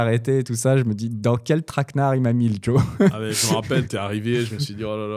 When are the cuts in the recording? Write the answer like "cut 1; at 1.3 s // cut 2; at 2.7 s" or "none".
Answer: none